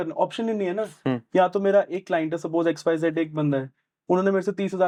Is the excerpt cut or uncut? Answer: uncut